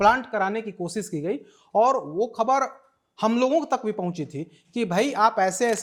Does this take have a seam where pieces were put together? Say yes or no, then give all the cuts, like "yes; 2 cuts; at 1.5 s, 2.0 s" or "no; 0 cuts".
no; 0 cuts